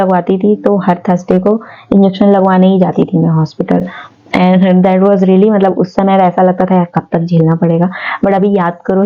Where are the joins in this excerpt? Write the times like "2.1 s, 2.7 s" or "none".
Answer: none